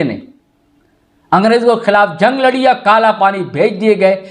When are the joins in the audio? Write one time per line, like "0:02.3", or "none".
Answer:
none